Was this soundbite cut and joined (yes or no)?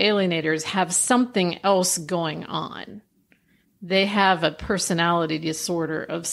no